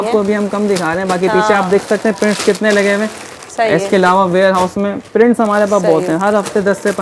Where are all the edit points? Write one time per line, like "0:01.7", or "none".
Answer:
none